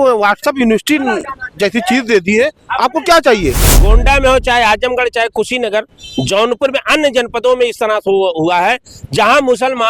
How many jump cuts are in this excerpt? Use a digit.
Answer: 1